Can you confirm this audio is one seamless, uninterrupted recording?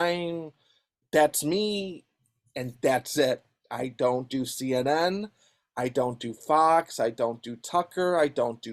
yes; 0 cuts

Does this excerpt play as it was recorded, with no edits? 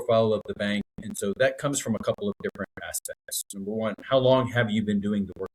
yes; 0 cuts

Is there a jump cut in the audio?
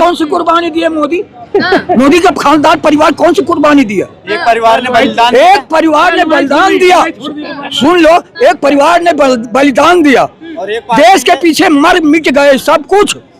no; 0 cuts

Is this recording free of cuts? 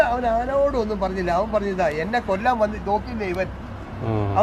yes; 0 cuts

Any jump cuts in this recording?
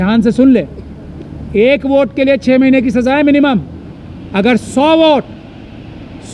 no; 0 cuts

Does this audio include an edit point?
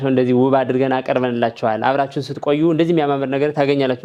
no; 0 cuts

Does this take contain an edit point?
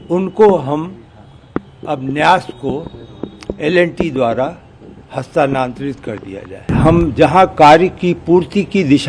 yes; 1 cut; at 6.7 s

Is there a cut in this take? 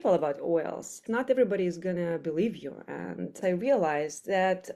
yes; 2 cuts; at 1.0 s, 3.4 s

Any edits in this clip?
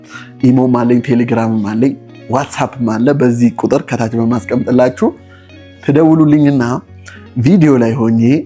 no; 0 cuts

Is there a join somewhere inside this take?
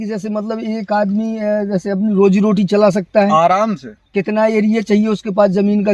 no; 0 cuts

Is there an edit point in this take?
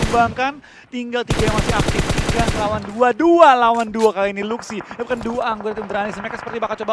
no; 0 cuts

